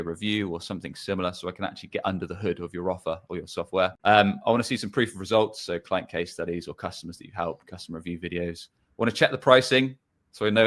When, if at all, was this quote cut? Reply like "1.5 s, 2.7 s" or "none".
4.0 s